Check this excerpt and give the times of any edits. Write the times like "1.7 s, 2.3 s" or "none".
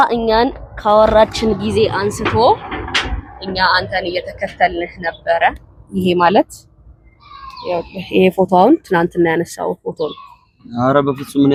none

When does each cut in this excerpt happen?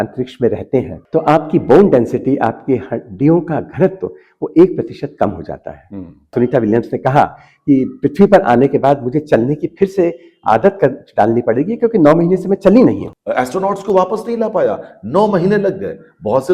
6.3 s, 13.1 s

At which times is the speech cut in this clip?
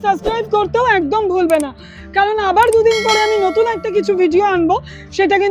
none

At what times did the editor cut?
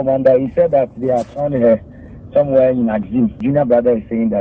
3.4 s

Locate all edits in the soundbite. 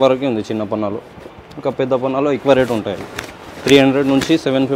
none

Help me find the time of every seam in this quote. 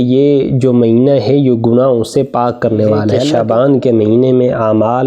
3.2 s

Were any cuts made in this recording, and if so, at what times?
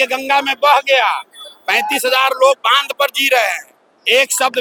none

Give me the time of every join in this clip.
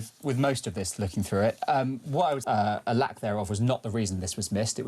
2.4 s

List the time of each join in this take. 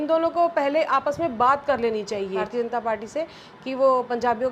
2.4 s

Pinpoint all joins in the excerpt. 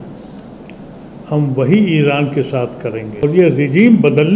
3.2 s

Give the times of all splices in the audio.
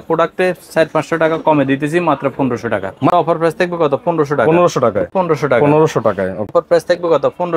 3.1 s, 5.1 s, 6.5 s

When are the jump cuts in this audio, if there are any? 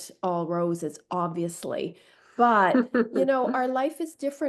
none

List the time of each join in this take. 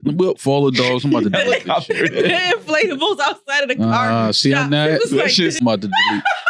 5.6 s

